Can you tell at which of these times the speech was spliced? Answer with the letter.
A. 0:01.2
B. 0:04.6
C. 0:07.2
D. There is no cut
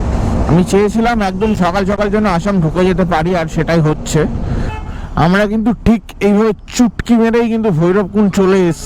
B